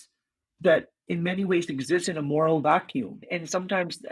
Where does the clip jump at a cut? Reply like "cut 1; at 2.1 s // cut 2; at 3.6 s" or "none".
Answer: cut 1; at 3.2 s